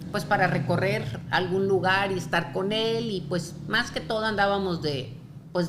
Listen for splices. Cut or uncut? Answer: uncut